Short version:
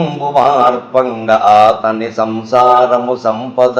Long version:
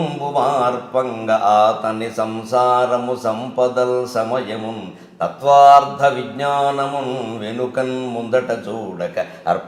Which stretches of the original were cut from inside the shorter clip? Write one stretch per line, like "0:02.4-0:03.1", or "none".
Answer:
none